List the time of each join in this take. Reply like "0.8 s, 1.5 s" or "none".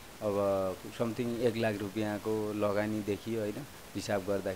none